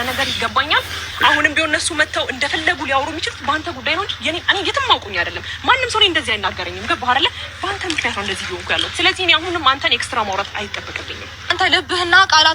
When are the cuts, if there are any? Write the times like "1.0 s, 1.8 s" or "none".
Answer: 11.5 s